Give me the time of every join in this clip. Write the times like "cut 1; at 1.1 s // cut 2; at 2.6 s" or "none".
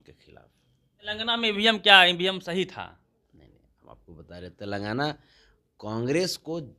cut 1; at 1.1 s